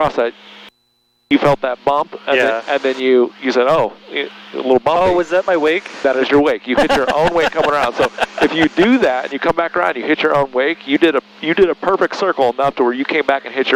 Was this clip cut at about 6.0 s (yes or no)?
no